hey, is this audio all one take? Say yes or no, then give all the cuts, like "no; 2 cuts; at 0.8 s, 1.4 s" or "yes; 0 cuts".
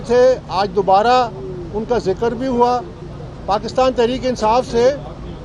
yes; 0 cuts